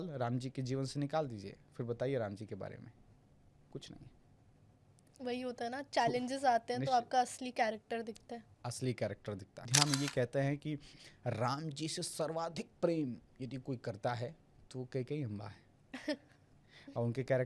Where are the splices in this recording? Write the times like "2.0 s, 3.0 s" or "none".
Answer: 9.7 s